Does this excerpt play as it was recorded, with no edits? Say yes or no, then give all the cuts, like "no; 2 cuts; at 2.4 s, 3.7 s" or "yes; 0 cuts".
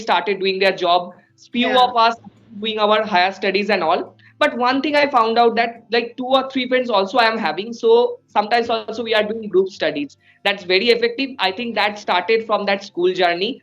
yes; 0 cuts